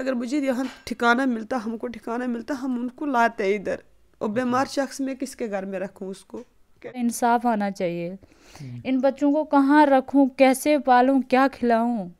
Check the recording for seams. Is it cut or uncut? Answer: cut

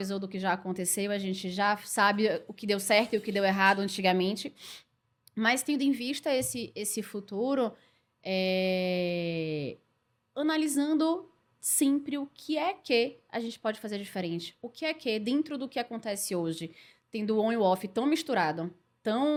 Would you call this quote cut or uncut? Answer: uncut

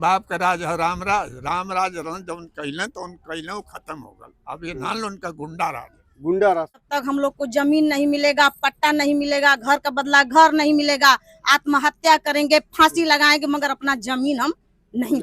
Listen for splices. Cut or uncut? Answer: cut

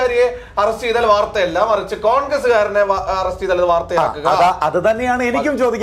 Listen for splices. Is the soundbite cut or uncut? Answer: uncut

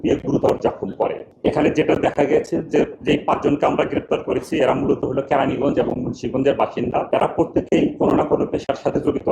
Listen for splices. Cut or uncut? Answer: cut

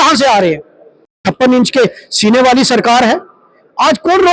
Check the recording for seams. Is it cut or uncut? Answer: cut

